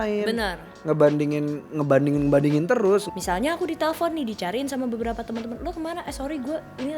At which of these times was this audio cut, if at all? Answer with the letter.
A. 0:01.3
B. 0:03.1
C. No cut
B